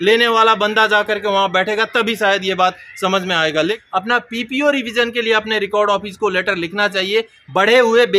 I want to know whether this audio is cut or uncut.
cut